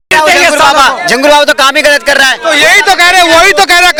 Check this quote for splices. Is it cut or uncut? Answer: uncut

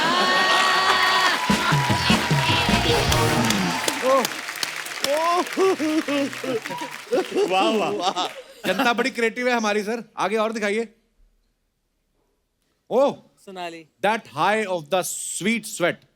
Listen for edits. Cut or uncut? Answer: uncut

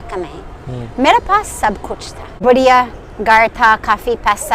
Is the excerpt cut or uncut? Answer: cut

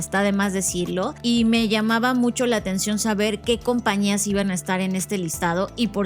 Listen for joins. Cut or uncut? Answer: cut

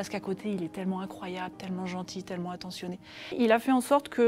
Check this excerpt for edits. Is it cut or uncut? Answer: cut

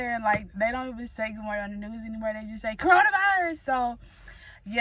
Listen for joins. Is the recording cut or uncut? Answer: uncut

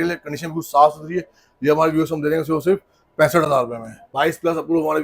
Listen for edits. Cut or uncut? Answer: cut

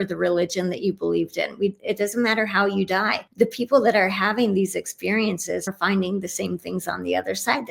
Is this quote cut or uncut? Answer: cut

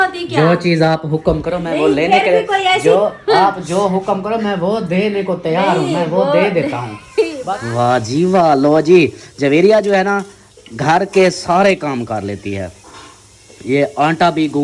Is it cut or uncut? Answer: cut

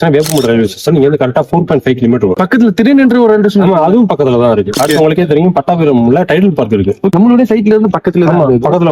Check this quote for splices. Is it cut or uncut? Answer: cut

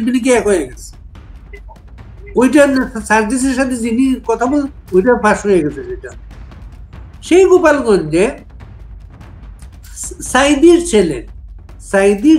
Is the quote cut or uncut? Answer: uncut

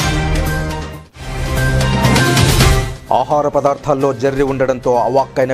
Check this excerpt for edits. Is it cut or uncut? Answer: cut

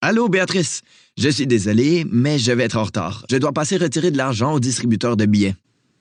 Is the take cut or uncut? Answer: uncut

